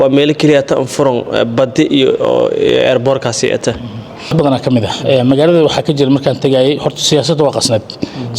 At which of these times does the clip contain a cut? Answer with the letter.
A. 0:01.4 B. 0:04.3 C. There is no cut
B